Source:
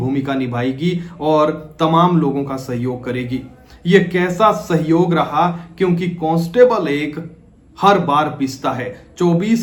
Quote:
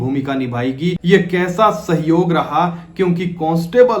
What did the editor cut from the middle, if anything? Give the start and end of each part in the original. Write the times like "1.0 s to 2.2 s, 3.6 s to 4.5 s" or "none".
1.0 s to 3.8 s